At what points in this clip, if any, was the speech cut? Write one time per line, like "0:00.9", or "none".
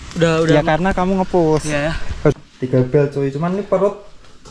0:02.3